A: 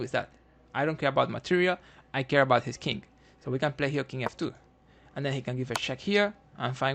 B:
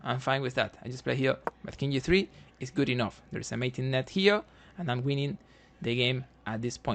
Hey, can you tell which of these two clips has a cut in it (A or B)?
B